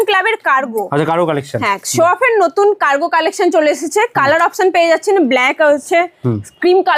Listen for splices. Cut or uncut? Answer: uncut